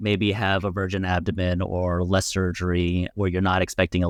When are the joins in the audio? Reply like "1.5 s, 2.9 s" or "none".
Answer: none